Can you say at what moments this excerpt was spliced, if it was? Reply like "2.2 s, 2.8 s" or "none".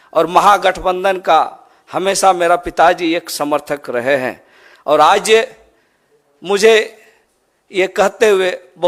none